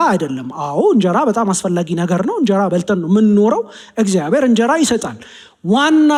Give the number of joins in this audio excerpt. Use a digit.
0